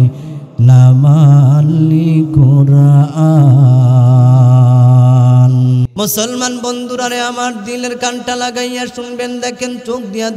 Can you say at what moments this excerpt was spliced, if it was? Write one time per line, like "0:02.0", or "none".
0:05.9

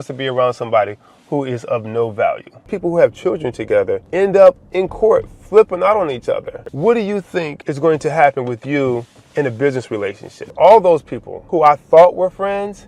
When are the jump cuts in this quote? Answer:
0:02.7
0:06.7
0:10.4

